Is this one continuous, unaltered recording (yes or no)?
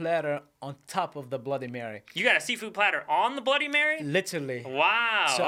yes